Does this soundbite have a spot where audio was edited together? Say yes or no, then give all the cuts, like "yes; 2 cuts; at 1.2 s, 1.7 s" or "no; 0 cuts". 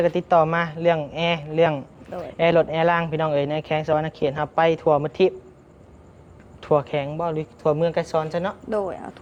no; 0 cuts